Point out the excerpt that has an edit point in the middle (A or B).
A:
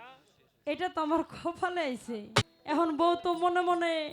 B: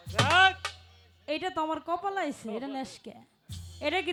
A